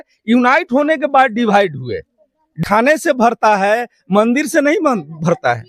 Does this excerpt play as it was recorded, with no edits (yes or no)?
no